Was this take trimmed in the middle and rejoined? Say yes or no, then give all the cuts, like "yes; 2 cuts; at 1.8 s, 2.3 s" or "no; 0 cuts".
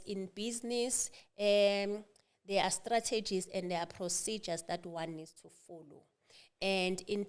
no; 0 cuts